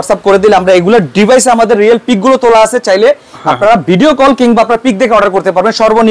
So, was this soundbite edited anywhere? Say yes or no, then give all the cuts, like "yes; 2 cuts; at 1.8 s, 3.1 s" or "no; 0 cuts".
no; 0 cuts